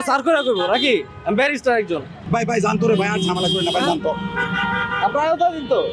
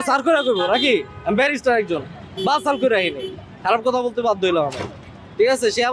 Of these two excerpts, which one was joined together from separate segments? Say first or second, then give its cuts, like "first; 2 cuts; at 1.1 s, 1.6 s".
first; 1 cut; at 2.1 s